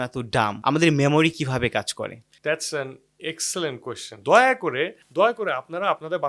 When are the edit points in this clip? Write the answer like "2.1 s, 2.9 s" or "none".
4.2 s